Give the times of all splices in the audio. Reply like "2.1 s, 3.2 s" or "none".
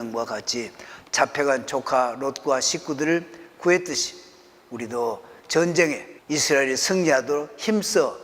6.1 s

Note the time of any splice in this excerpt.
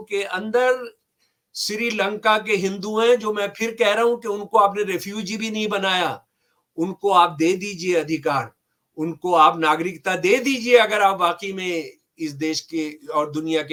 none

